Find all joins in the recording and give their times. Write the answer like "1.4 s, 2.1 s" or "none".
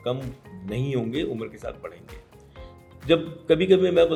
none